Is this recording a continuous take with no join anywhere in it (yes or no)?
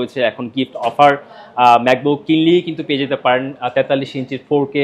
yes